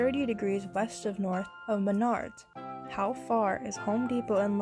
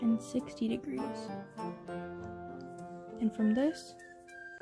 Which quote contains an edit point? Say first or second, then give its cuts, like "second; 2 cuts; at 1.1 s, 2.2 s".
second; 3 cuts; at 1.5 s, 2.8 s, 3.7 s